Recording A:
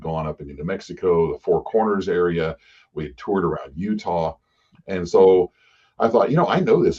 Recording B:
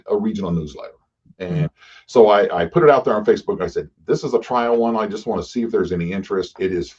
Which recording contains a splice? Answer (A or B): B